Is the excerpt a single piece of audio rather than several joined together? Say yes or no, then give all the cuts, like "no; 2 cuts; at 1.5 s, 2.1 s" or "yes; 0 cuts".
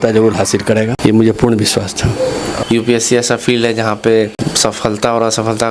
no; 3 cuts; at 0.9 s, 2.5 s, 4.5 s